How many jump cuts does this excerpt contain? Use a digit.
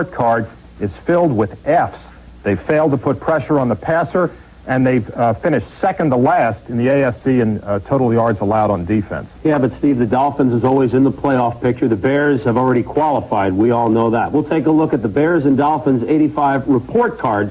1